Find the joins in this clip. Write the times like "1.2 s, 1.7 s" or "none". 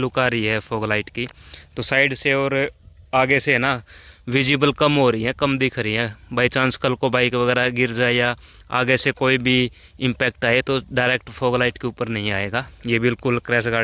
none